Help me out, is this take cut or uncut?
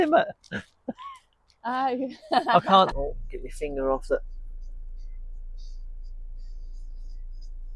cut